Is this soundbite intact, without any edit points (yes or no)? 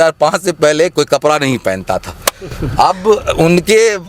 yes